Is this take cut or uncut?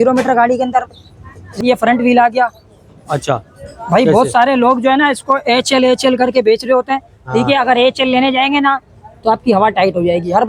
cut